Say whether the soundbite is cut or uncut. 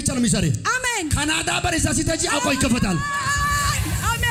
uncut